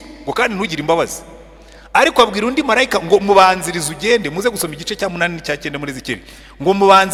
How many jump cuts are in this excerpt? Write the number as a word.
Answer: zero